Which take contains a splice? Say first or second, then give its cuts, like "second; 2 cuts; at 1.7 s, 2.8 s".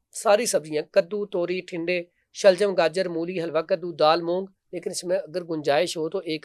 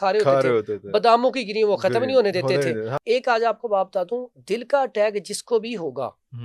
second; 1 cut; at 2.9 s